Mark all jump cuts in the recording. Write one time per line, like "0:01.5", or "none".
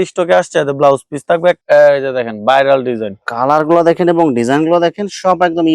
0:01.6